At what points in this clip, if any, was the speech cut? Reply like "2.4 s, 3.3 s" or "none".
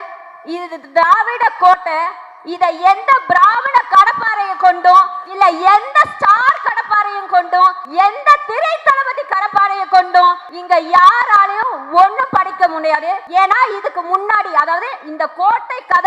5.2 s, 7.8 s, 10.5 s, 13.2 s

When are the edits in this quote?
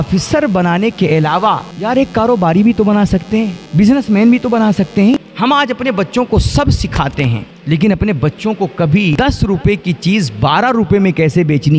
1.7 s, 3.6 s, 5.1 s, 7.5 s, 9.1 s

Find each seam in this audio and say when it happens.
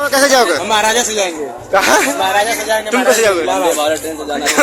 none

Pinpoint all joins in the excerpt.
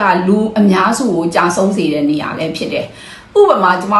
none

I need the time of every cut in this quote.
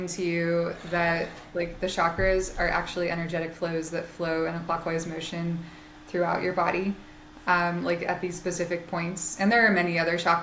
none

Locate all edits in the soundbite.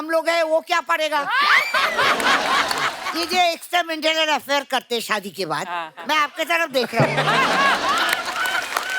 3.0 s

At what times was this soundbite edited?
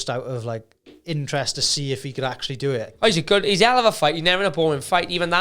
2.9 s

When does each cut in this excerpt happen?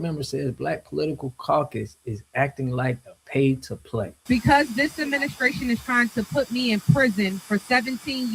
4.2 s

